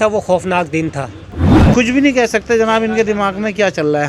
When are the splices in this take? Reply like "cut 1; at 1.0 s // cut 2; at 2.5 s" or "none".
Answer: cut 1; at 1.5 s